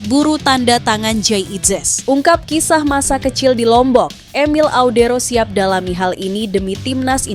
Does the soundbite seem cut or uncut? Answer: cut